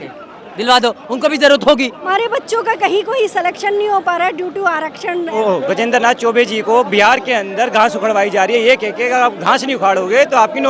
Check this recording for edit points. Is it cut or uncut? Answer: cut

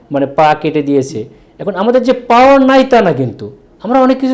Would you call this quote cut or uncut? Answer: uncut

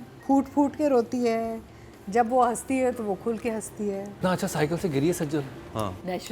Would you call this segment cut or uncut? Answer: cut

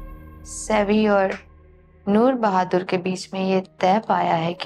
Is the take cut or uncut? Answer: uncut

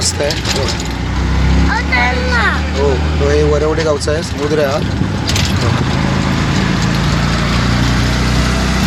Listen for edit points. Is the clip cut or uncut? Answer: uncut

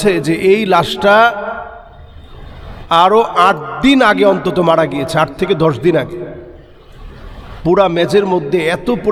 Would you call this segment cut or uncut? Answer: uncut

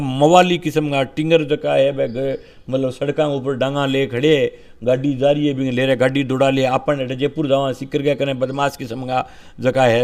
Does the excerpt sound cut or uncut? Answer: uncut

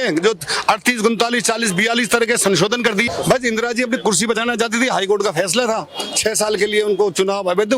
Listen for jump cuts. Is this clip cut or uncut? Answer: cut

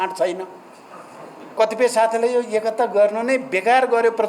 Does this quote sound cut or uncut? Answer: cut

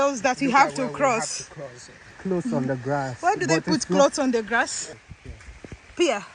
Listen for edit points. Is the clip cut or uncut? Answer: cut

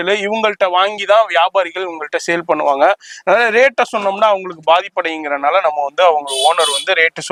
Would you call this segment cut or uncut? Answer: uncut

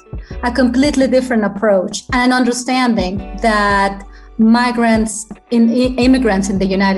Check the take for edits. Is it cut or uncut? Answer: uncut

